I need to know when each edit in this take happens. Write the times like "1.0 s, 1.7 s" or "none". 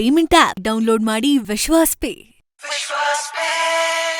none